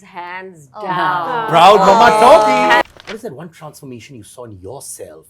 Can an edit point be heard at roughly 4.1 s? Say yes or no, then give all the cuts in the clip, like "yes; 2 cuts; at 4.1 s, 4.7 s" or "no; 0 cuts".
no; 1 cut; at 2.8 s